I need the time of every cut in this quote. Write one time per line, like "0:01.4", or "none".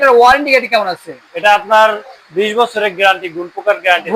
none